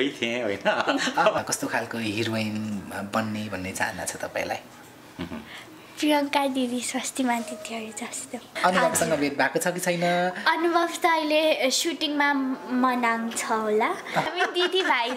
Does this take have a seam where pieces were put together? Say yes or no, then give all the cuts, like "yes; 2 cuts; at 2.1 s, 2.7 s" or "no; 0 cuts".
yes; 3 cuts; at 1.4 s, 8.6 s, 14.3 s